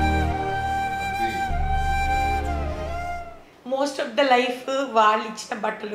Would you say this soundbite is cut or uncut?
cut